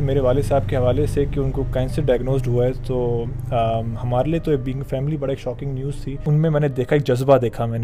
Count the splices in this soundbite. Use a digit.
1